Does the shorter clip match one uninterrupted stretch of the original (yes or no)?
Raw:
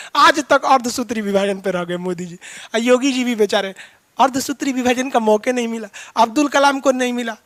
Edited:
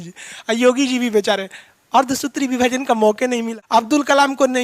no